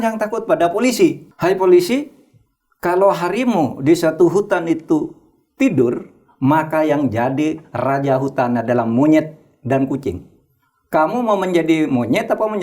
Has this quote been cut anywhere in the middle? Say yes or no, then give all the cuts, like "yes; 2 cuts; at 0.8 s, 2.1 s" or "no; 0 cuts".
yes; 1 cut; at 1.3 s